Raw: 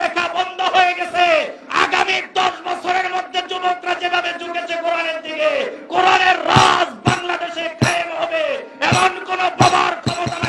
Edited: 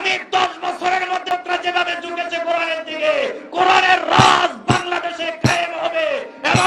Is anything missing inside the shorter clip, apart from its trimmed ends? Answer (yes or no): yes